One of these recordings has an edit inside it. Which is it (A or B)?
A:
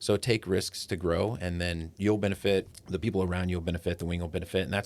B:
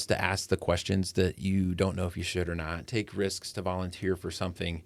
A